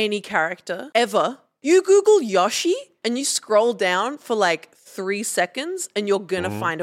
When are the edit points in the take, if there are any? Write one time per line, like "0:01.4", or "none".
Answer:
0:00.8
0:01.5
0:02.9